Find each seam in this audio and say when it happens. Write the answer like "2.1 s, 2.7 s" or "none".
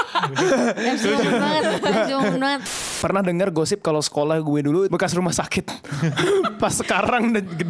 2.9 s, 4.9 s